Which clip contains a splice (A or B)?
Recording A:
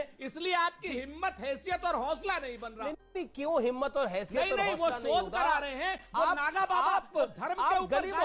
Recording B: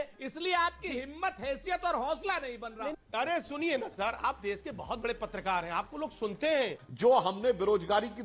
B